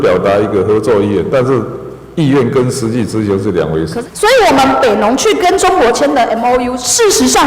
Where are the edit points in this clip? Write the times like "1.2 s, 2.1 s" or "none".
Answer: 3.9 s